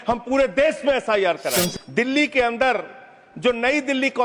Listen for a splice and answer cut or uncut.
cut